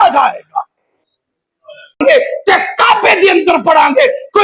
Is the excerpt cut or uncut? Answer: cut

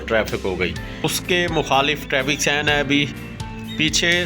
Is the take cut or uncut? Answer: cut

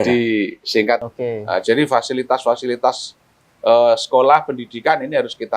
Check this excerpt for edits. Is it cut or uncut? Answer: cut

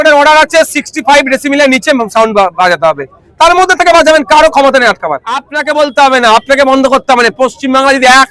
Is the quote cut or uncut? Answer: cut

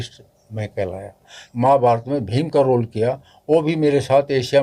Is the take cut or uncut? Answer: cut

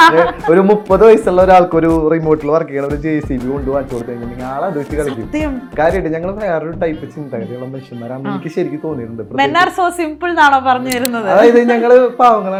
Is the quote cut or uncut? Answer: uncut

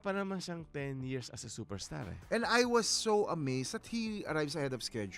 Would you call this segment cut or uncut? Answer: cut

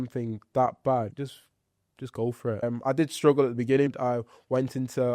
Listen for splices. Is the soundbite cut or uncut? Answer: cut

